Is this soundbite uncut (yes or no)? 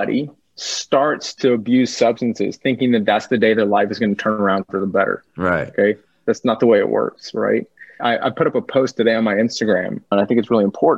no